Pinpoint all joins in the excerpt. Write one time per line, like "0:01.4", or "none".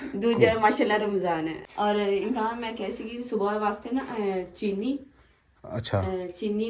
0:01.6